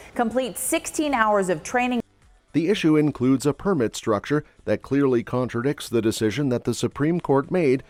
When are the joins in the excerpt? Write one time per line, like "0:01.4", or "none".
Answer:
none